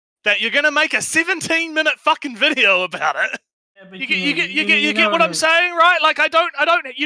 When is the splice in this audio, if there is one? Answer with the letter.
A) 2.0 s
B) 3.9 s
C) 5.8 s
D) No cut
B